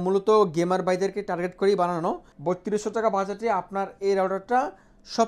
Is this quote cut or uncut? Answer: cut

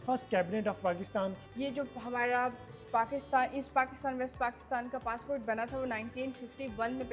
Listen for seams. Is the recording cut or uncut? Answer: cut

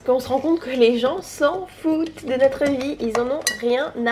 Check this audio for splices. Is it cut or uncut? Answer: uncut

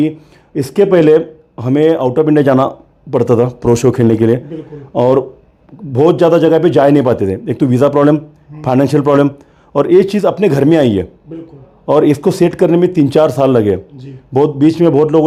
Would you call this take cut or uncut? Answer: uncut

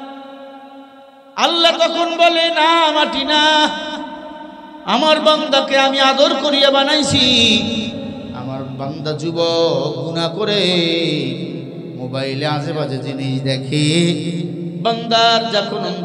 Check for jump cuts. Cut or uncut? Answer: uncut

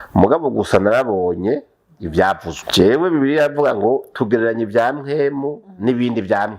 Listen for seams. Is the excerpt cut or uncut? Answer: cut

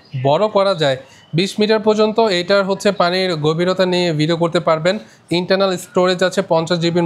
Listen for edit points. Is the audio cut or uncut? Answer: uncut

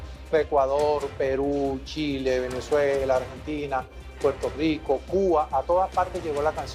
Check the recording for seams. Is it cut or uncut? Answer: uncut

